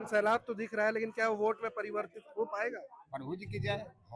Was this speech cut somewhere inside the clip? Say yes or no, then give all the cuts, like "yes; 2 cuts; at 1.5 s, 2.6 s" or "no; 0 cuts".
no; 0 cuts